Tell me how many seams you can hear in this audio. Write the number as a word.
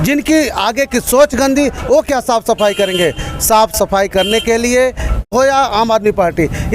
one